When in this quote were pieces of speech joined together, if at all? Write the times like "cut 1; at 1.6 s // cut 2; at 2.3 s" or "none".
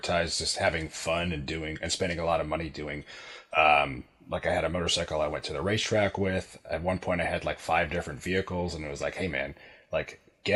none